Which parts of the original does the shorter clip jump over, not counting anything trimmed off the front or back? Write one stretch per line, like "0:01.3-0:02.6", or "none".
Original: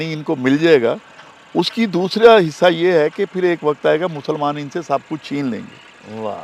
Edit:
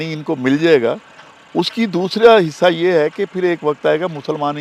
none